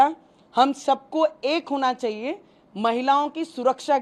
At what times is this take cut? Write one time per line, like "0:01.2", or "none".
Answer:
none